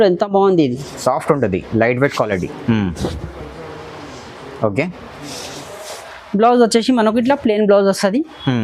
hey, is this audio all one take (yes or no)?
yes